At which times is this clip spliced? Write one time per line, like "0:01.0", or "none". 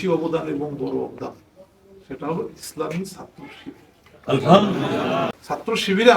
0:05.2